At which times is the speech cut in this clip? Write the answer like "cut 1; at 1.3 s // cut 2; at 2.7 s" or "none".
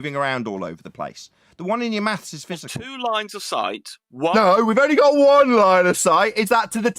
cut 1; at 2.8 s